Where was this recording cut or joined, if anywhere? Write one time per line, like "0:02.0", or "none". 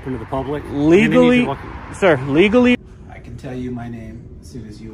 0:02.8